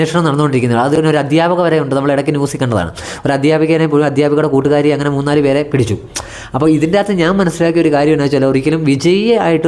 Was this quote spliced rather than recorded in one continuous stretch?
no; 0 cuts

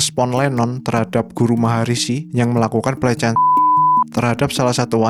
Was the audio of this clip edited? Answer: no; 0 cuts

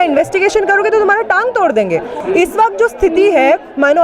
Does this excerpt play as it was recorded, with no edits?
no; 1 cut; at 2.2 s

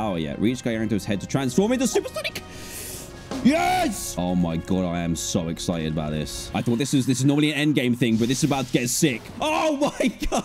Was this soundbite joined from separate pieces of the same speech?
yes; 3 cuts; at 4.0 s, 6.5 s, 9.3 s

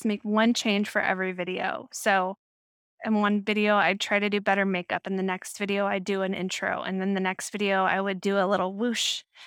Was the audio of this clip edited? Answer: no; 0 cuts

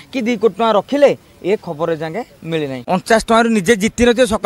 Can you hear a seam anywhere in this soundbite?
yes; 1 cut; at 2.7 s

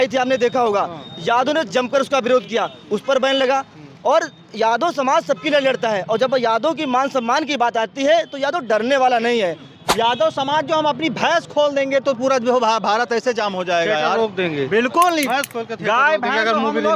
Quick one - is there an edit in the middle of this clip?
yes; 1 cut; at 9.7 s

